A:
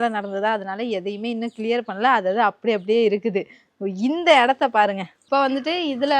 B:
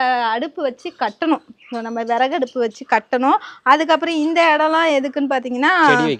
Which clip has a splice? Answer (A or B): A